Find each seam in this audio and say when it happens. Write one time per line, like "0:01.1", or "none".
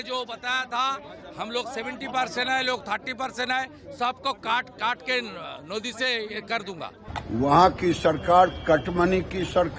0:07.0